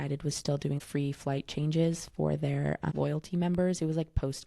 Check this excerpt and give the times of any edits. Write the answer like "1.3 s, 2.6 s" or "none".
0.8 s, 2.9 s